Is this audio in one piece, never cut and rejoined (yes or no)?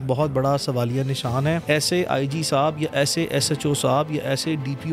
no